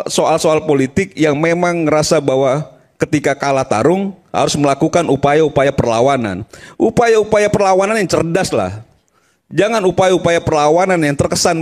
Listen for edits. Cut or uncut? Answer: uncut